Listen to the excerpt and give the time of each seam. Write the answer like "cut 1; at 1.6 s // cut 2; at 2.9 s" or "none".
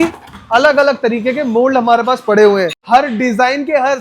cut 1; at 2.8 s